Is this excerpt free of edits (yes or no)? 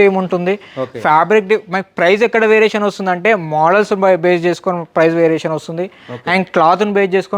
yes